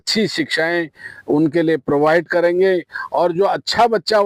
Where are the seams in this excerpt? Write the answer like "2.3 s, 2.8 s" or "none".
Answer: none